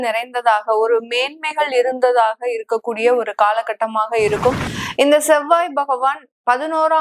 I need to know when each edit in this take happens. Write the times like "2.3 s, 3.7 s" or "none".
4.7 s